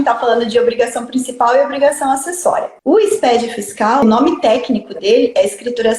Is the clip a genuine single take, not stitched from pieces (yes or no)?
no